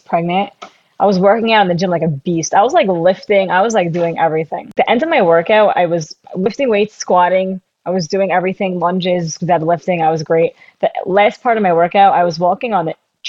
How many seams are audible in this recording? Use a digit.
1